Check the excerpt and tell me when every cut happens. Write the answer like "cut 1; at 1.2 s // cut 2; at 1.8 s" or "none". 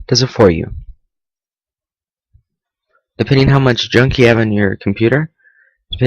cut 1; at 4.1 s